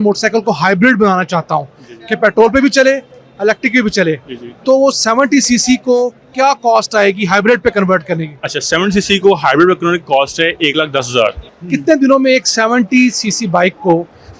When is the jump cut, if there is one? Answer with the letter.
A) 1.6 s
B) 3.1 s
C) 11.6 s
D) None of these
C